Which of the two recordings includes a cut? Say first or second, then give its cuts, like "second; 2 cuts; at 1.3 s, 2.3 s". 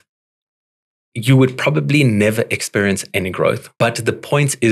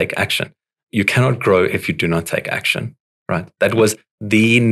first; 1 cut; at 3.7 s